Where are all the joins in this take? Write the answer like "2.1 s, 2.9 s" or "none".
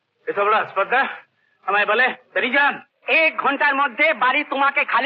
2.9 s